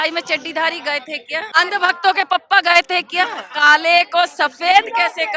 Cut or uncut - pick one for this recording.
cut